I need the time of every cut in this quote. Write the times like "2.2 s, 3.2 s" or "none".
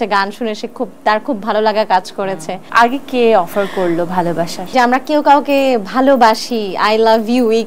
2.6 s, 4.7 s